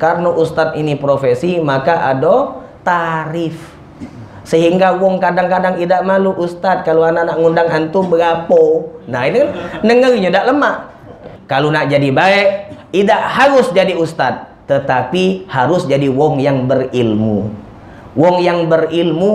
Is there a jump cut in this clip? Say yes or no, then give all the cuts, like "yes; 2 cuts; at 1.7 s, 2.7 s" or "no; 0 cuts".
yes; 1 cut; at 11.3 s